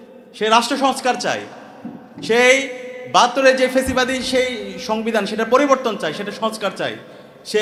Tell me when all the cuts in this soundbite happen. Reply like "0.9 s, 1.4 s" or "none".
none